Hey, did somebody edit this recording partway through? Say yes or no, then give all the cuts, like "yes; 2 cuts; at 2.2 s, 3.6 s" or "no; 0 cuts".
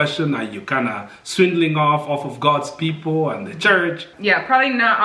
yes; 1 cut; at 4.1 s